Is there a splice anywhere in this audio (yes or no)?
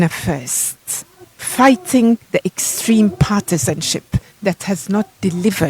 yes